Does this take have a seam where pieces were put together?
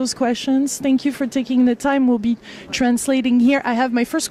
no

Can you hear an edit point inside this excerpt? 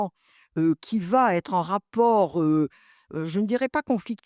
no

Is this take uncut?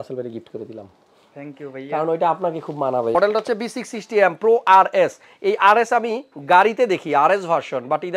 no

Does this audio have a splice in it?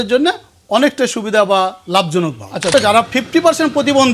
yes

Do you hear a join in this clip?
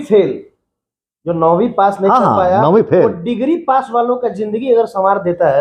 no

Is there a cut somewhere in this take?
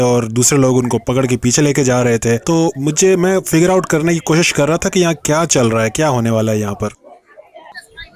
no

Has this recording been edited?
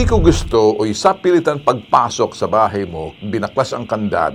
no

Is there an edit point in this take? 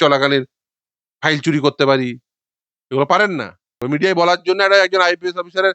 yes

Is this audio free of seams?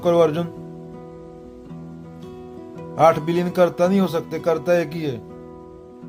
no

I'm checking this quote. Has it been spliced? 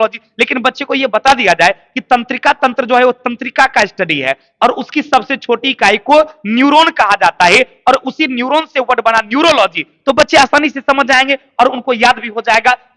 no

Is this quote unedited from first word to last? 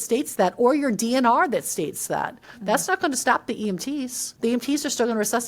no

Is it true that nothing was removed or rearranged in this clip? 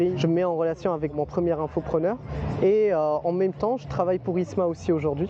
yes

